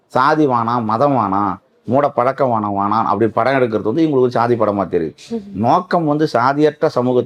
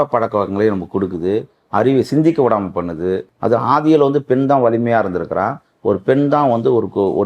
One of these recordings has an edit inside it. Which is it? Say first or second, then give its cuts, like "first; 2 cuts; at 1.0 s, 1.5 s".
second; 1 cut; at 3.3 s